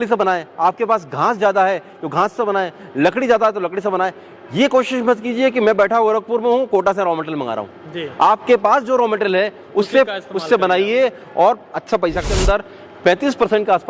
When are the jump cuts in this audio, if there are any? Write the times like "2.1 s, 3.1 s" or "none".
12.3 s